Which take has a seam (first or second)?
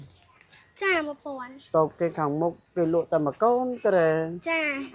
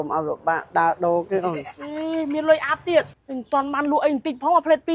second